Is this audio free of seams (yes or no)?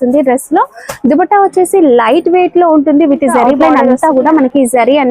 no